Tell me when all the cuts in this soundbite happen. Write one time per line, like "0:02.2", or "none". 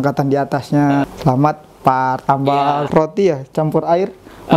0:01.1
0:02.9